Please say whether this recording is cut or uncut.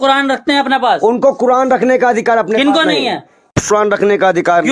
cut